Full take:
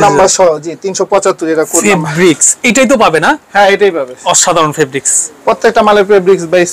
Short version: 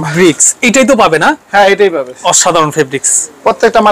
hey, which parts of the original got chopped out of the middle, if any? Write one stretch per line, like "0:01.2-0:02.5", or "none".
none